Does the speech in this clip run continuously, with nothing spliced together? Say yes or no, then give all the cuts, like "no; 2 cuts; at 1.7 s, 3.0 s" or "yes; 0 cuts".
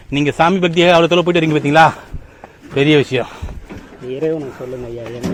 yes; 0 cuts